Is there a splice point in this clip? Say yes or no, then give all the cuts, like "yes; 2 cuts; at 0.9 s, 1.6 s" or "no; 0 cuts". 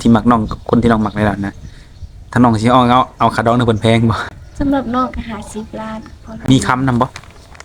yes; 2 cuts; at 4.3 s, 6.4 s